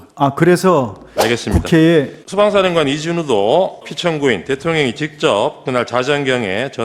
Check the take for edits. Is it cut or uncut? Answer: cut